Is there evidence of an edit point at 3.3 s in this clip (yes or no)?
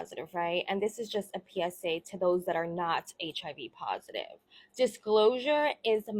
no